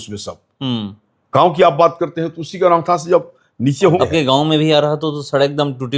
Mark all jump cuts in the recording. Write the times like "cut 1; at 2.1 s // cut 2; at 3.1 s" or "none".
cut 1; at 4.0 s